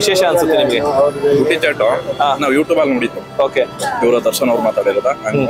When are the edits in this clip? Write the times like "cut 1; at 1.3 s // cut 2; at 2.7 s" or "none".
none